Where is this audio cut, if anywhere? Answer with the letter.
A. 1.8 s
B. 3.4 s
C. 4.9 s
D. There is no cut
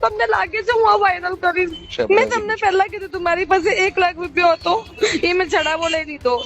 A